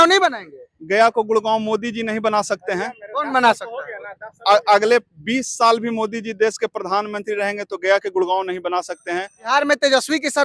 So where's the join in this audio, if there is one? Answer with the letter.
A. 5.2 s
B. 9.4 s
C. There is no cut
B